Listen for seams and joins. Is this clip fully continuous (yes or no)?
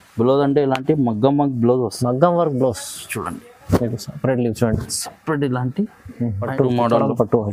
no